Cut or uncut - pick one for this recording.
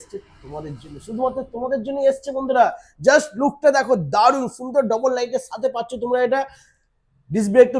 uncut